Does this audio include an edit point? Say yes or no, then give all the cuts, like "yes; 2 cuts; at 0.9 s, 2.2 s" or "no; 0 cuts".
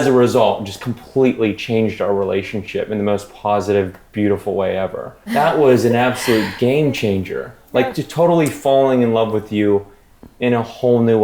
yes; 1 cut; at 5.2 s